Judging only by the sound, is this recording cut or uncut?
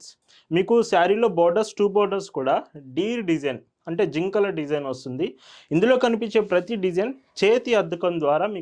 uncut